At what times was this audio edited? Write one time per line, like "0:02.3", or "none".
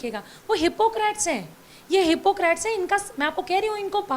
none